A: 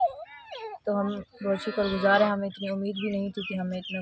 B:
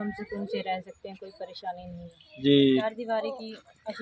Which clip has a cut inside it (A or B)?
B